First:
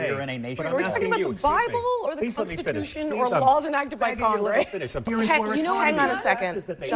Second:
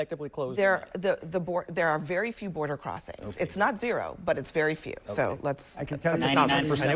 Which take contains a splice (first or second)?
first